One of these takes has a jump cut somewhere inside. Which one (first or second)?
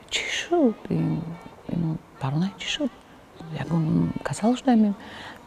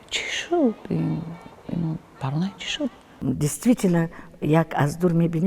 second